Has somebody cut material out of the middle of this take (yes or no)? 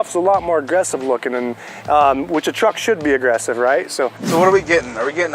yes